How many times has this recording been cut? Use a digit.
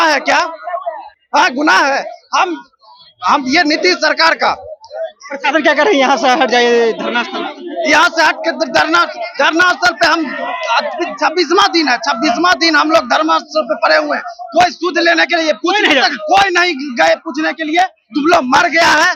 0